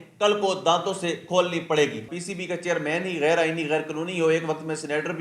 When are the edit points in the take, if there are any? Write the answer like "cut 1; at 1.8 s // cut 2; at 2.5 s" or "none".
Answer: cut 1; at 2.1 s